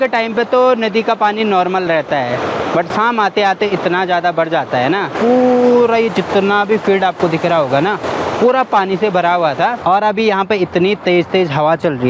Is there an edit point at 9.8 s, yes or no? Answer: yes